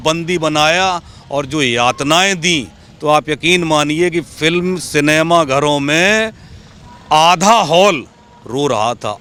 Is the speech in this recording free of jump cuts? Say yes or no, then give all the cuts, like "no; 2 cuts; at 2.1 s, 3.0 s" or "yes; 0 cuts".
yes; 0 cuts